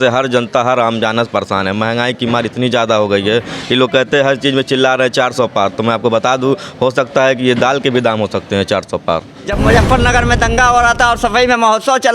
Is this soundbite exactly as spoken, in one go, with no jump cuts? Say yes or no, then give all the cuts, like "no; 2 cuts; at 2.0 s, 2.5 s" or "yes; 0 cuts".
no; 1 cut; at 9.4 s